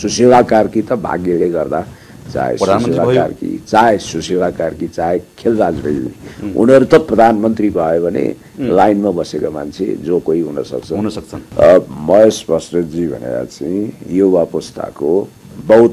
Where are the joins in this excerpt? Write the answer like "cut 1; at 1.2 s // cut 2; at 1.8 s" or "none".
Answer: cut 1; at 11.3 s